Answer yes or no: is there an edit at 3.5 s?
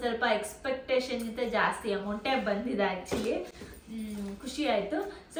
no